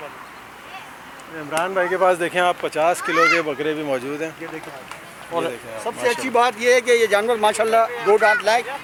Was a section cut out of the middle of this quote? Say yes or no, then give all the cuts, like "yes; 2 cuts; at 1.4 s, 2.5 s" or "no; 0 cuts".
no; 0 cuts